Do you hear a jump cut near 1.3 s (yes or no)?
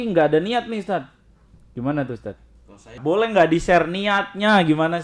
no